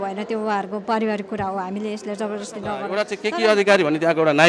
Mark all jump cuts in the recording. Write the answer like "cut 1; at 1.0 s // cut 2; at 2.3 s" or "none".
cut 1; at 3.0 s

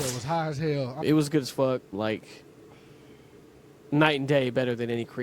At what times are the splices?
cut 1; at 0.9 s

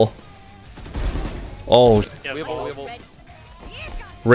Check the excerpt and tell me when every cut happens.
cut 1; at 2.1 s

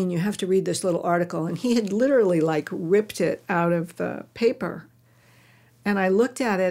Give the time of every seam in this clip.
none

